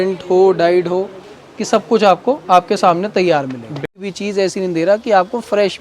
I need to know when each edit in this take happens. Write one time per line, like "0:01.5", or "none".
0:04.1